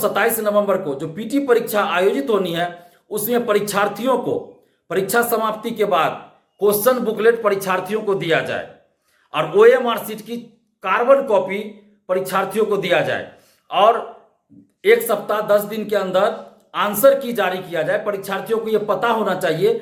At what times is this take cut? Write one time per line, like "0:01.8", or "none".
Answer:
none